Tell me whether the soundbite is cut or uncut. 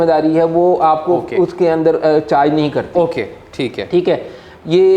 uncut